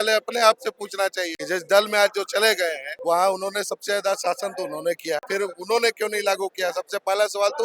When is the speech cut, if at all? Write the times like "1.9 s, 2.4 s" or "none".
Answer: 1.4 s, 2.9 s, 5.2 s